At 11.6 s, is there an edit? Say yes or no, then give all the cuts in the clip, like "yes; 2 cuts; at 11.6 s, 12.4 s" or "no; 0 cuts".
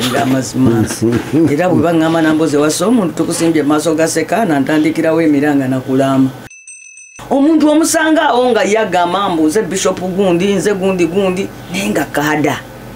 no; 1 cut; at 6.7 s